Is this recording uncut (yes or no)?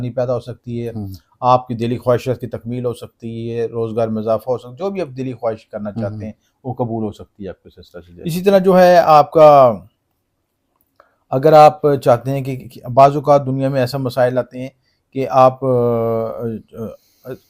no